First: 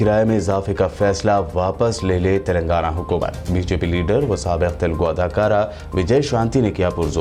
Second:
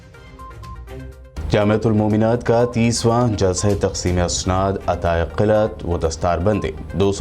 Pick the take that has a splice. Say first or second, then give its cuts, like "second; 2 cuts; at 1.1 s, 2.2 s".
second; 1 cut; at 1.0 s